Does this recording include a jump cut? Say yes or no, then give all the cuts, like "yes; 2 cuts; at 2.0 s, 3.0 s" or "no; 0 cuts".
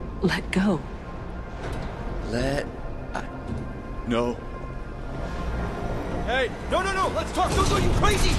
no; 0 cuts